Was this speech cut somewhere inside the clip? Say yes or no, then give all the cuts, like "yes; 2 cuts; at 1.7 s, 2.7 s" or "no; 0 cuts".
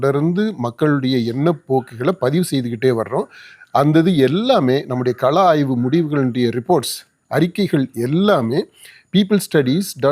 no; 0 cuts